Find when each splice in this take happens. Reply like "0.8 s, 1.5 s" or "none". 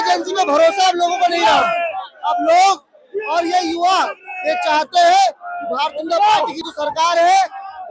none